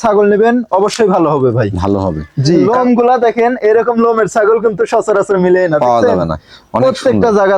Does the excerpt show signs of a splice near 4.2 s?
no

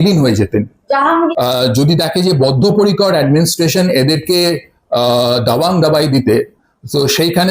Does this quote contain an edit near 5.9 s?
no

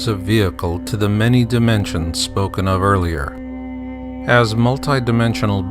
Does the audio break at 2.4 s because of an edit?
no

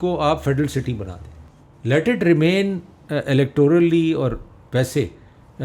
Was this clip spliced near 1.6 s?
no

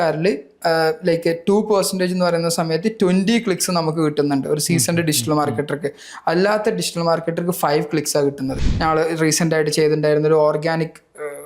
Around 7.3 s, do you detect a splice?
no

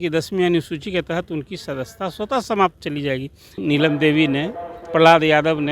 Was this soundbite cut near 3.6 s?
yes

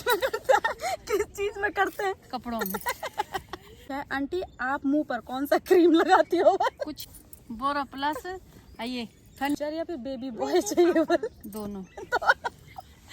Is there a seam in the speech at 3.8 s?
yes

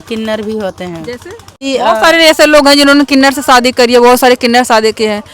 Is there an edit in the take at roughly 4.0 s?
no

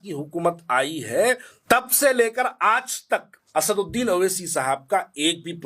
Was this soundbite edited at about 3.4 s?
yes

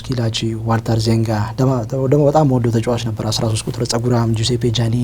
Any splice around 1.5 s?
no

